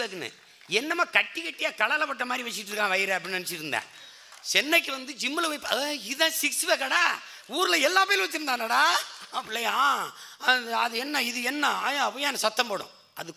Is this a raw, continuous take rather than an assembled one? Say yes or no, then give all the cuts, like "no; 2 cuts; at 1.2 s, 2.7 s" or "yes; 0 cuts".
no; 1 cut; at 9.5 s